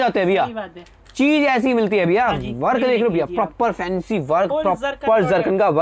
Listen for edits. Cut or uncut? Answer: uncut